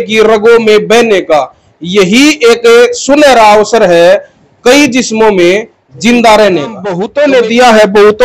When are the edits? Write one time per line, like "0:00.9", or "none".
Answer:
0:07.0